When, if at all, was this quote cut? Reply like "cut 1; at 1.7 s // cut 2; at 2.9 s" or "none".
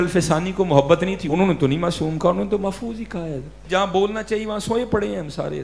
cut 1; at 1.2 s // cut 2; at 3.6 s